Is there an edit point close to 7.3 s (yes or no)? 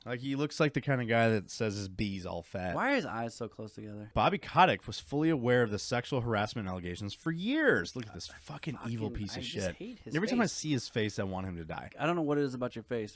no